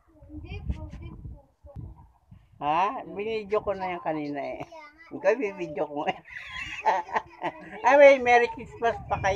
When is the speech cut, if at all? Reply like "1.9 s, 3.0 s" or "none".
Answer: 1.6 s